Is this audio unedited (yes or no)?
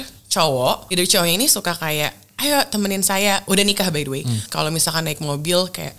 no